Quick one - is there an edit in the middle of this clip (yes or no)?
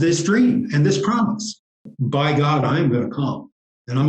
yes